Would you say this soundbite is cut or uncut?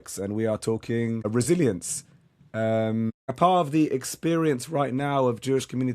cut